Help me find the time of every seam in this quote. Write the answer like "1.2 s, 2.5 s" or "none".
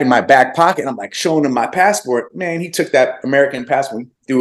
none